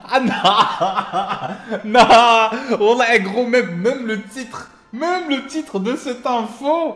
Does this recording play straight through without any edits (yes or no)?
yes